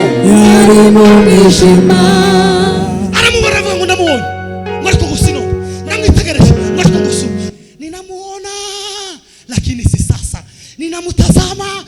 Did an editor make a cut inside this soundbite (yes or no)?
yes